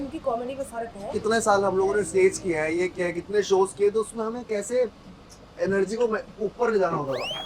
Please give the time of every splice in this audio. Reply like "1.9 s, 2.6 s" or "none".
1.1 s

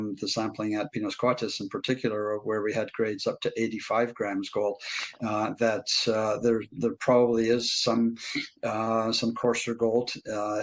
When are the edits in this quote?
none

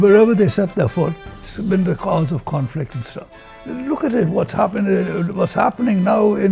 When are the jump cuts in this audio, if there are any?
none

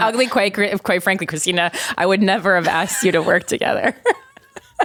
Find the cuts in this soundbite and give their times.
none

